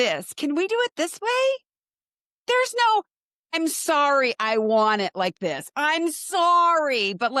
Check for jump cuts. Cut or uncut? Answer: uncut